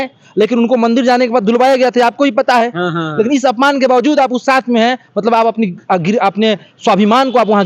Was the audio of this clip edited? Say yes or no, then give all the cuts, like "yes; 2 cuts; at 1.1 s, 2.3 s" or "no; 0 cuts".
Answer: no; 0 cuts